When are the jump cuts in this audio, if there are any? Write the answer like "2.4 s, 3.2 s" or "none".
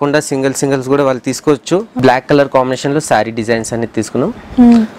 1.9 s